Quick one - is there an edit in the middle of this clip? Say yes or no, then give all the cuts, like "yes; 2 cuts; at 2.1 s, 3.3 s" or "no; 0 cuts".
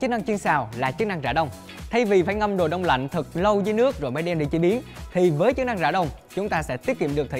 no; 0 cuts